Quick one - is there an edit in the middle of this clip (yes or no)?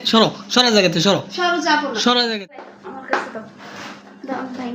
yes